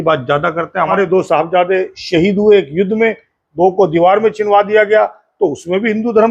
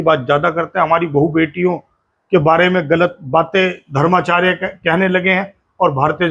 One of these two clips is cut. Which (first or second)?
first